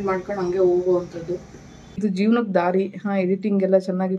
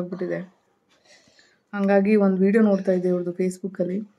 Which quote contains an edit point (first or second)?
first